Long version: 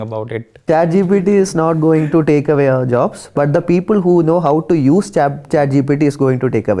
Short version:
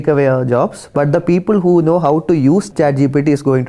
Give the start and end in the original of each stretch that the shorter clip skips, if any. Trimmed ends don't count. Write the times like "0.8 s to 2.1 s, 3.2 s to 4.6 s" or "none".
5.1 s to 5.4 s